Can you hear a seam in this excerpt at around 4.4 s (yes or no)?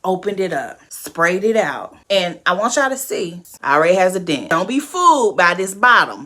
yes